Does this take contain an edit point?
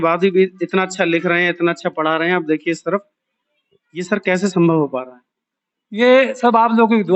no; 0 cuts

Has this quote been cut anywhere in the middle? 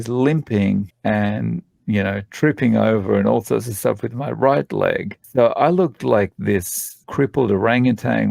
yes; 3 cuts; at 0.9 s, 5.1 s, 7.0 s

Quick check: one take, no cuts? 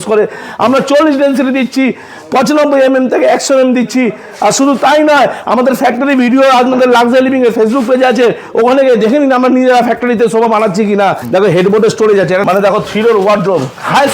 no; 2 cuts; at 11.2 s, 12.4 s

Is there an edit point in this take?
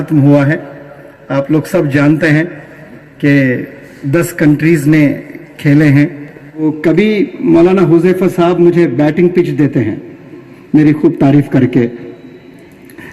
yes; 1 cut; at 6.6 s

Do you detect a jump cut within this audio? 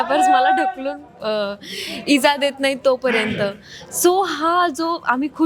no; 0 cuts

